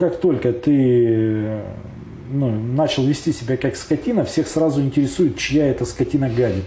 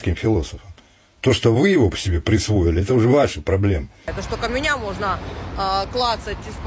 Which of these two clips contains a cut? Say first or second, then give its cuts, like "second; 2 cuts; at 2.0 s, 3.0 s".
second; 1 cut; at 4.1 s